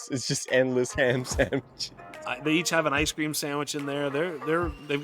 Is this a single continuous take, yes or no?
no